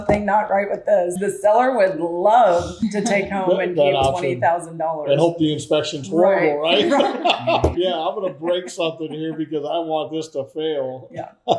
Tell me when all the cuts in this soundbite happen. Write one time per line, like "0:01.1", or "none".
0:01.1
0:02.8
0:07.7